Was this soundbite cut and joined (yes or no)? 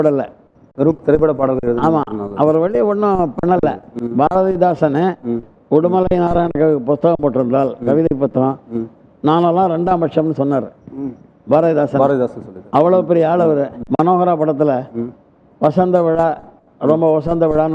yes